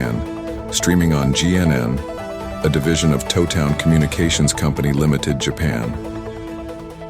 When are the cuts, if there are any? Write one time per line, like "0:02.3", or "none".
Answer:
0:02.2